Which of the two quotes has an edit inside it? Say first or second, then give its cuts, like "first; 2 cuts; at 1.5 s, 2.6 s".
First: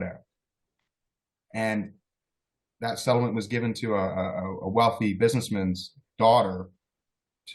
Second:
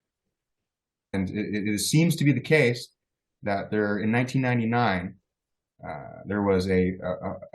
second; 1 cut; at 1.1 s